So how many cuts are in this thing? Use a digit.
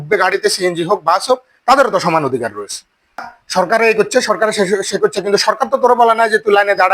1